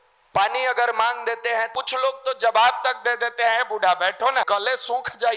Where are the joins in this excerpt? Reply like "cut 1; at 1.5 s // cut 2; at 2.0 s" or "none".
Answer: cut 1; at 1.7 s // cut 2; at 4.5 s